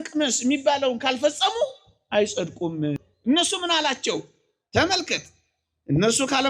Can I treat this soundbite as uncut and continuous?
no; 1 cut; at 3.1 s

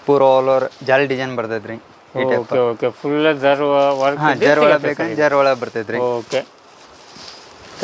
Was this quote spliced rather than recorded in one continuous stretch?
no; 0 cuts

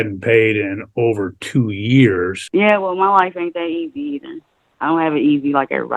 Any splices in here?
yes; 1 cut; at 2.4 s

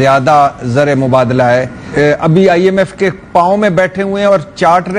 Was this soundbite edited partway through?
yes; 1 cut; at 1.9 s

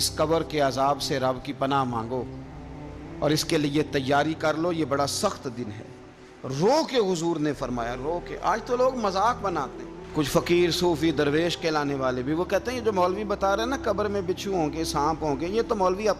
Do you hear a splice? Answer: no; 0 cuts

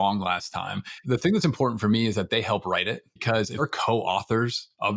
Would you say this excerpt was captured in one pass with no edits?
no; 2 cuts; at 1.0 s, 3.6 s

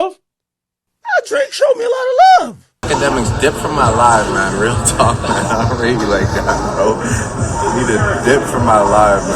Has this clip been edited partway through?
yes; 1 cut; at 2.8 s

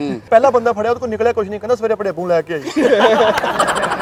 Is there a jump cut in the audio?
no; 0 cuts

